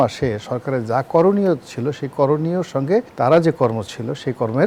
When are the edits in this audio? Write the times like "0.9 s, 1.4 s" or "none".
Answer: none